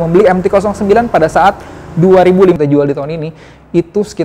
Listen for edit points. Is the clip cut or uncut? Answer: cut